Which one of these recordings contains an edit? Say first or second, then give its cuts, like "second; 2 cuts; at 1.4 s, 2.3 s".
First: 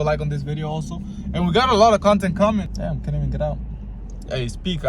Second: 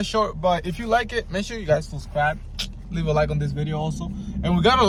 first; 1 cut; at 2.7 s